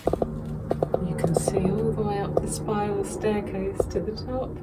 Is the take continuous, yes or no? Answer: yes